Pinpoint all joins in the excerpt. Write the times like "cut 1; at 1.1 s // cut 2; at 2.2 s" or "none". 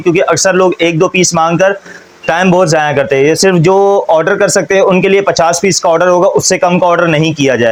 none